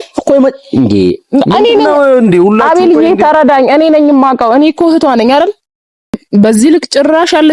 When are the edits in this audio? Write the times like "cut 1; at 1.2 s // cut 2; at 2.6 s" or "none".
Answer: cut 1; at 6.2 s

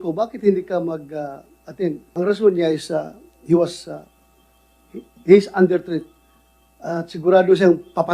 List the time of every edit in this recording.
cut 1; at 2.0 s

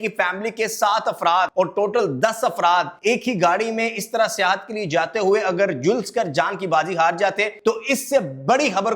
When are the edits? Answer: cut 1; at 1.5 s // cut 2; at 2.9 s // cut 3; at 7.5 s

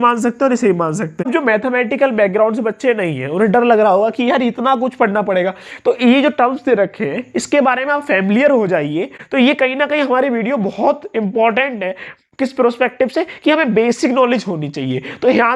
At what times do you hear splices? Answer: cut 1; at 1.3 s // cut 2; at 9.2 s

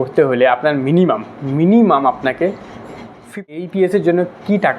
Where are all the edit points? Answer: cut 1; at 3.5 s

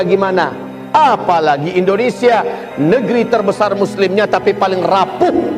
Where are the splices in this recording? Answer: none

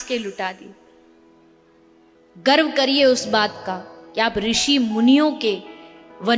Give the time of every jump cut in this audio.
cut 1; at 2.1 s

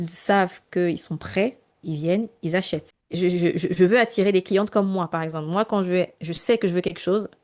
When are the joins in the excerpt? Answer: none

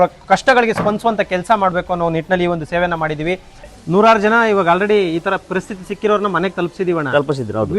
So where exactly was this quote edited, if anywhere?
cut 1; at 3.8 s

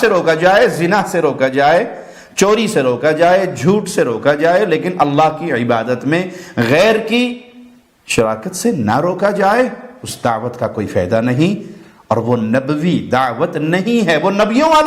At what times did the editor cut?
none

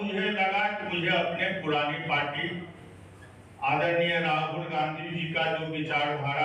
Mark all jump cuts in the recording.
none

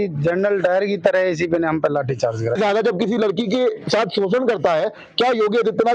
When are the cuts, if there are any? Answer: cut 1; at 2.5 s

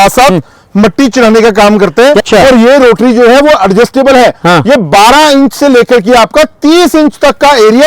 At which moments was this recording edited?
cut 1; at 2.2 s

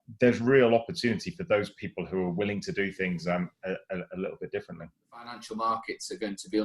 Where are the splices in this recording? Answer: cut 1; at 5.4 s

